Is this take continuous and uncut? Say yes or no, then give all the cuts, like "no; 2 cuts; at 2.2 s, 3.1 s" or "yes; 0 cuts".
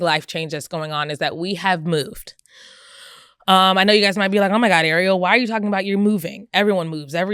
yes; 0 cuts